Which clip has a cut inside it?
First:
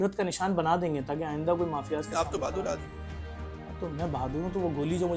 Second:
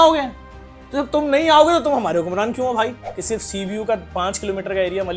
second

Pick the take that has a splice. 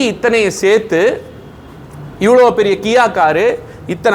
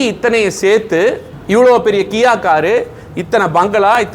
second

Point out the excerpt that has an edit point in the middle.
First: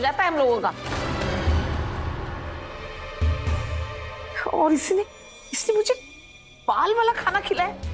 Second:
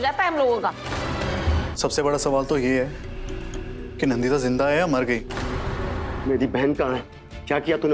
second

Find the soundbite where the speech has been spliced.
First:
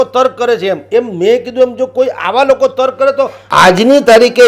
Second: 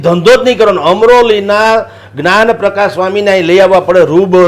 first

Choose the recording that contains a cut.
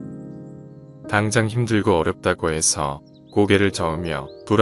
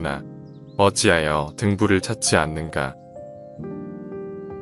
second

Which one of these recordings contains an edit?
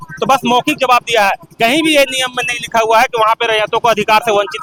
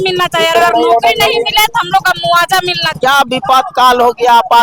second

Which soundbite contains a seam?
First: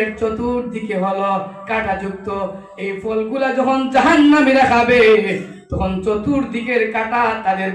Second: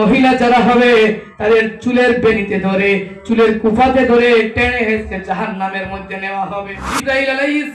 second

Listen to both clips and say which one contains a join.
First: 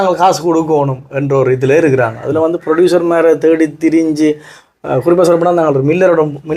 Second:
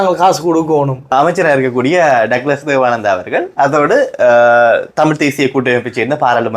second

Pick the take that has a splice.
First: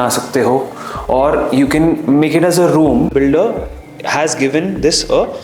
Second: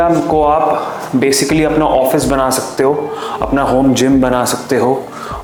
first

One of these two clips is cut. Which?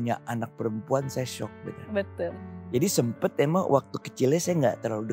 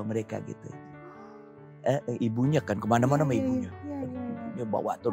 first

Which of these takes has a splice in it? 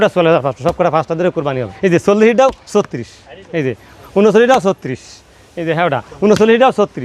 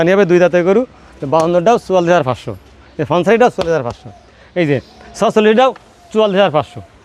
first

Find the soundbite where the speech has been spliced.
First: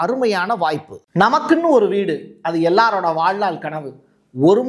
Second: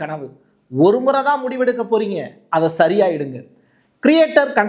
first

